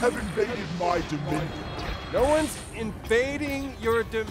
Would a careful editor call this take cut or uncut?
cut